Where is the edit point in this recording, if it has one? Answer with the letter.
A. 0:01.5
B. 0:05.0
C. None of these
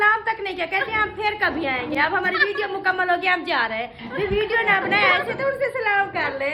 C